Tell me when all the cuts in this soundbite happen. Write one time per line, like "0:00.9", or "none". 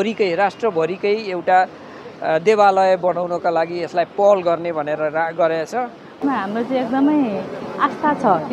0:06.2